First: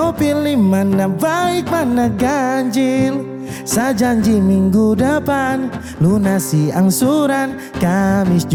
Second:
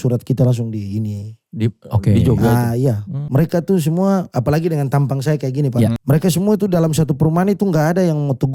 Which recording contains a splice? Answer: second; 2 cuts; at 3.2 s, 6.0 s

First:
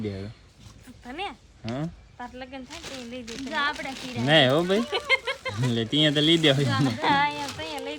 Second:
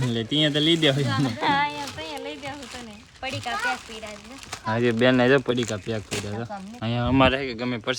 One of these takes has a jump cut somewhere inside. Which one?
second; 1 cut; at 6.7 s

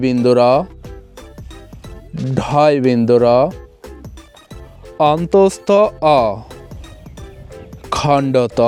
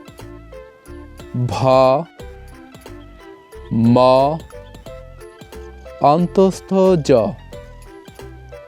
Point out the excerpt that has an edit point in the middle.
second; 2 cuts; at 4.4 s, 5.8 s

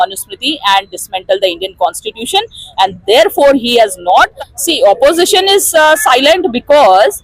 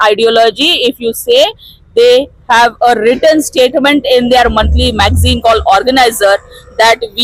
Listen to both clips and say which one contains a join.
first; 1 cut; at 4.3 s

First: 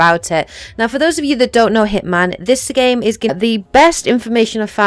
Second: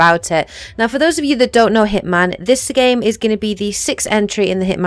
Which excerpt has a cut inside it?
second; 1 cut; at 3.3 s

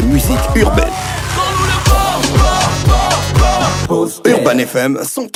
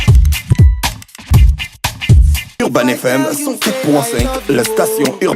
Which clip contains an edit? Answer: second; 1 cut; at 2.5 s

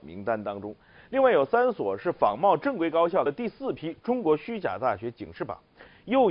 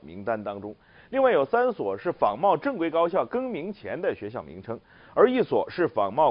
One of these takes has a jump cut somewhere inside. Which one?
second; 1 cut; at 3.2 s

